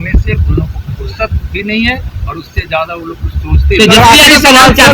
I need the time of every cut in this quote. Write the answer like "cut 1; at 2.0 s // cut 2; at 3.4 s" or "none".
none